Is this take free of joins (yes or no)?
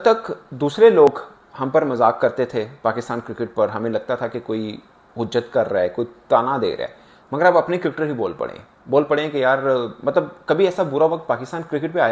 yes